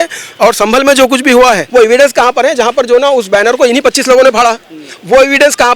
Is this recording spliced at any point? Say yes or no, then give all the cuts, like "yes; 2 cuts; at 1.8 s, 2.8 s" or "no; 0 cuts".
yes; 1 cut; at 1.6 s